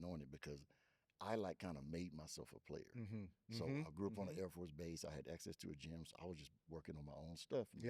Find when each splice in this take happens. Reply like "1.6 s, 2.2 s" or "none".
none